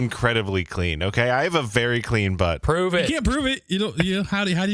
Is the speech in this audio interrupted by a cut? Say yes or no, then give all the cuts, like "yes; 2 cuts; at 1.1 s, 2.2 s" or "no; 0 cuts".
no; 0 cuts